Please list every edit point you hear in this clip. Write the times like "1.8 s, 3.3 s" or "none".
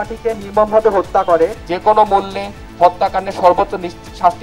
1.7 s